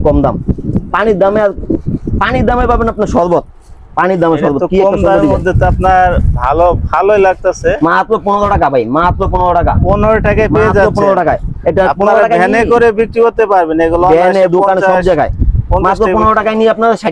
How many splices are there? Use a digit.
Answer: 0